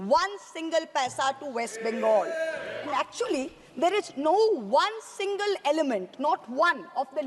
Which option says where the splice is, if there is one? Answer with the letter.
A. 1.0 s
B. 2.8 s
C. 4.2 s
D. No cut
B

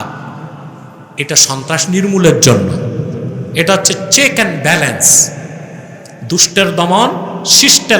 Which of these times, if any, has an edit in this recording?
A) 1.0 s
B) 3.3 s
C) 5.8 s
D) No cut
D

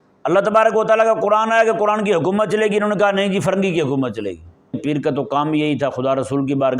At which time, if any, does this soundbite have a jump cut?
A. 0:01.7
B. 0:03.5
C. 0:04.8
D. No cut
C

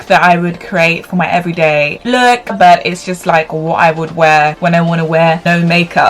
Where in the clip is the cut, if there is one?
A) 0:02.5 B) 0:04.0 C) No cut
A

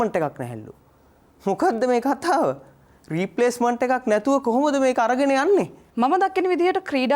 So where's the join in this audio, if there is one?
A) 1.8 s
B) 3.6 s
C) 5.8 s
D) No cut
C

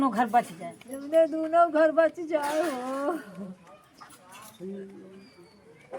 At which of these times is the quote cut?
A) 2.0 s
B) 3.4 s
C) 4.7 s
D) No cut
D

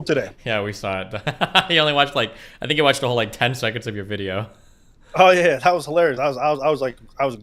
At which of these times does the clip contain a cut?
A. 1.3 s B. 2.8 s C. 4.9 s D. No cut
D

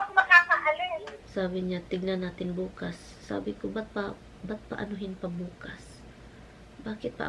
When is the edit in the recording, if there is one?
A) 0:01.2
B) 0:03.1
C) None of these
A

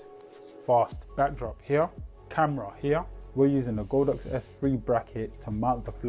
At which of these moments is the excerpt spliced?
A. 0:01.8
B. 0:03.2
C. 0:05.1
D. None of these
D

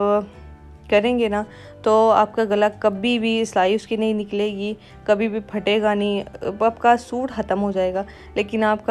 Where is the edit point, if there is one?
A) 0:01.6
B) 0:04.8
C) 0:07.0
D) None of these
D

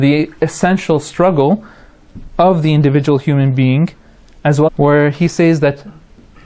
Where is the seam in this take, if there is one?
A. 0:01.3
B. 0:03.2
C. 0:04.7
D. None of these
D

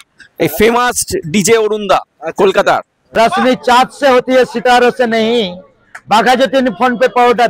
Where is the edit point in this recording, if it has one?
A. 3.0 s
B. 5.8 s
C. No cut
A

